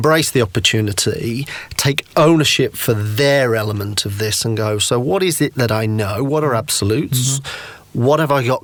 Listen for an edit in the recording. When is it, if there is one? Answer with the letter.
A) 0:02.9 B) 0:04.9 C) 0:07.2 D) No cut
D